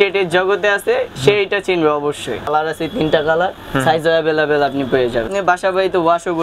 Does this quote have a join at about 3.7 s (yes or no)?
no